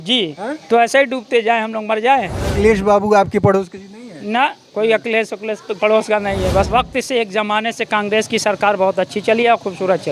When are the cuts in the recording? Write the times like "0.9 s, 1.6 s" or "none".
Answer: 2.6 s, 6.7 s